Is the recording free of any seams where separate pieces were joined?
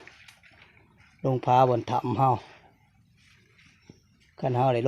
yes; 0 cuts

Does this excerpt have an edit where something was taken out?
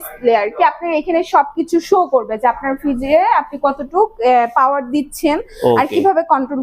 no; 0 cuts

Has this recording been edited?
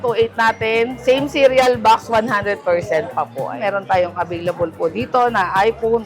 yes; 2 cuts; at 1.0 s, 3.6 s

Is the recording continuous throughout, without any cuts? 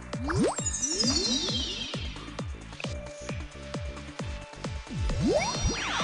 no; 2 cuts; at 1.7 s, 5.2 s

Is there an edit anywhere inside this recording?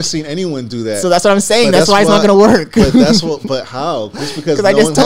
no; 0 cuts

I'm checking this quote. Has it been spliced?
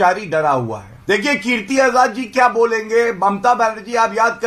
no; 0 cuts

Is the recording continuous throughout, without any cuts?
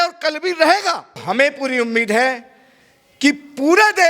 no; 1 cut; at 1.2 s

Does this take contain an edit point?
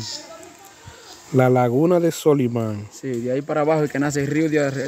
no; 0 cuts

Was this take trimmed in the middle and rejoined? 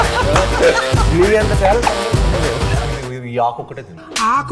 yes; 1 cut; at 2.8 s

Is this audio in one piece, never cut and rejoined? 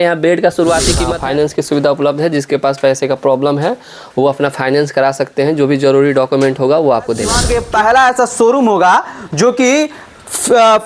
no; 2 cuts; at 1.1 s, 7.4 s

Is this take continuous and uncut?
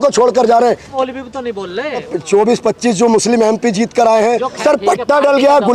no; 3 cuts; at 0.8 s, 2.1 s, 4.6 s

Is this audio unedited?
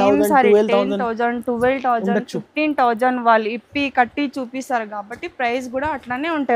yes; 0 cuts

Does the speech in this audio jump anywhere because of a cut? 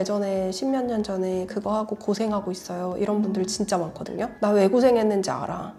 no; 0 cuts

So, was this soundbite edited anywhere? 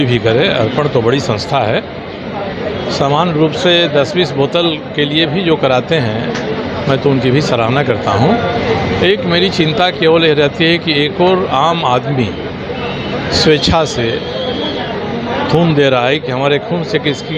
no; 0 cuts

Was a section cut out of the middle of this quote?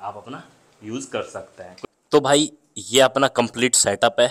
yes; 1 cut; at 1.7 s

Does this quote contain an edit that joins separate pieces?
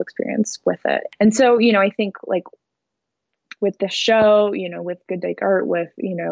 yes; 1 cut; at 1.1 s

